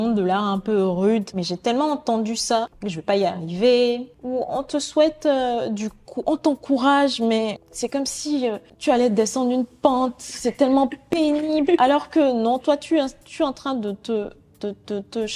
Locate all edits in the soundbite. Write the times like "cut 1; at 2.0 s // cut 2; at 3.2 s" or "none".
cut 1; at 1.3 s // cut 2; at 2.8 s // cut 3; at 4.1 s // cut 4; at 7.7 s // cut 5; at 8.7 s